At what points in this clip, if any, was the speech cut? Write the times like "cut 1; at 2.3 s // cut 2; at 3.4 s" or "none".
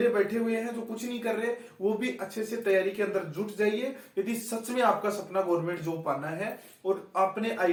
none